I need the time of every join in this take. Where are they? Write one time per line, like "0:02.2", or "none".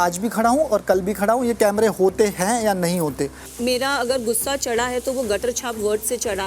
0:03.4